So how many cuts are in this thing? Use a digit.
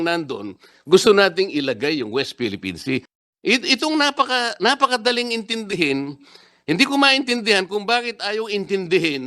1